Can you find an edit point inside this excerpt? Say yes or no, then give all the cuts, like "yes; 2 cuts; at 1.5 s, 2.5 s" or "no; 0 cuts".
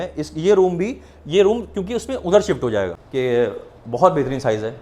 yes; 1 cut; at 3.0 s